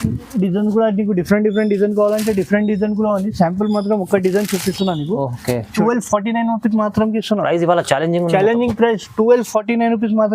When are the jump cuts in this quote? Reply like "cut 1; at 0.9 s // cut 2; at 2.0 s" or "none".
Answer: cut 1; at 5.7 s